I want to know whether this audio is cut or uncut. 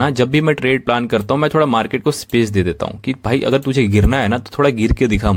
uncut